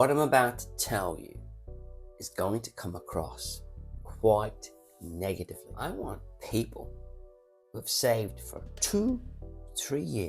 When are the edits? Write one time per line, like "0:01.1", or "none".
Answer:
0:05.6